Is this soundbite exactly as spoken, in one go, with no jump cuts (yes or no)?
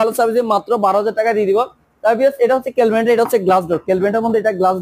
yes